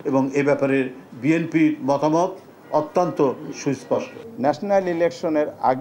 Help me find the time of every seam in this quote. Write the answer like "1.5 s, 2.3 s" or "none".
4.2 s